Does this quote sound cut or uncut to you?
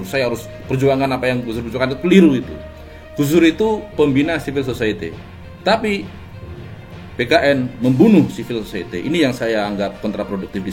uncut